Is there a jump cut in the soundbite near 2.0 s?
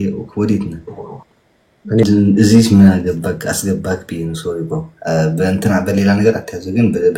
yes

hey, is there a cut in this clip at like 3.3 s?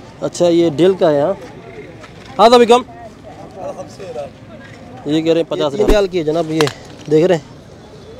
no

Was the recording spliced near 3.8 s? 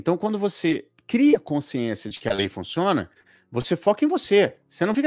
no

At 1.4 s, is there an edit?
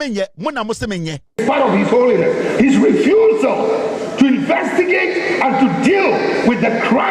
yes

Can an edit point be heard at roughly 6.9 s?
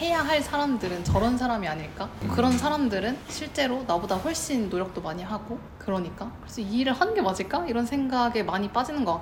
no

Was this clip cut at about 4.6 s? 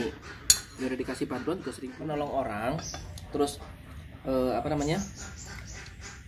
no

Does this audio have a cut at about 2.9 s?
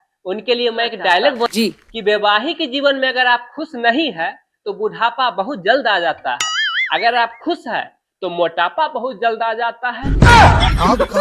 no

